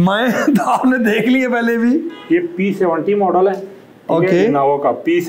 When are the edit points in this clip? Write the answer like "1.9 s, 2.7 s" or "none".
none